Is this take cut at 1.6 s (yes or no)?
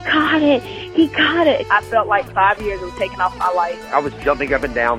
yes